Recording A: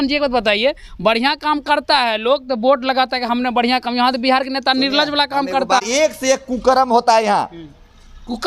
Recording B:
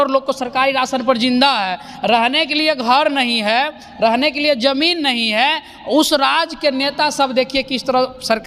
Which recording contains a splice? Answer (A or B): A